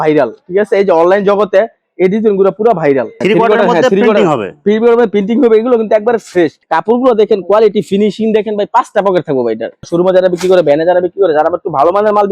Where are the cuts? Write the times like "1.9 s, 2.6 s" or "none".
3.1 s, 6.6 s, 9.8 s